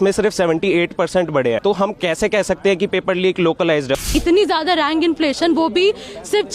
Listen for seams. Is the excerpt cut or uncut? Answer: cut